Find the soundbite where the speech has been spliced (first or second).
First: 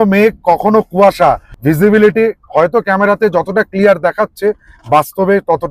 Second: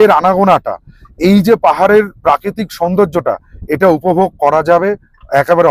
first